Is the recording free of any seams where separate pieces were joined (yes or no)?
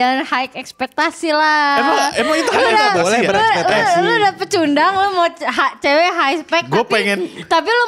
yes